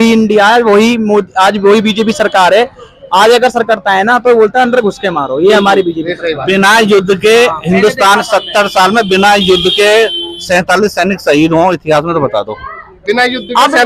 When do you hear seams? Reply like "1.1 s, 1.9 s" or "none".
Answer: none